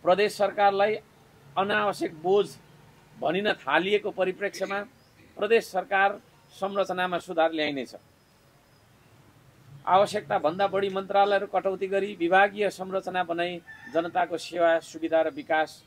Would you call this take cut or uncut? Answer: uncut